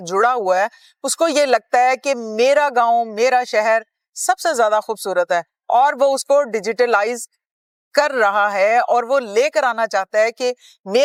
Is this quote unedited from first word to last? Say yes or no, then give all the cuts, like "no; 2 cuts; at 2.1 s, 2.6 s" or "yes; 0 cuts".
yes; 0 cuts